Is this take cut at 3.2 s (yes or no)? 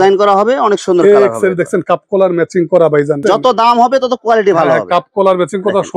yes